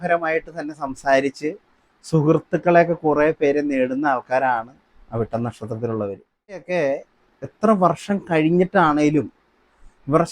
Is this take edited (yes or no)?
yes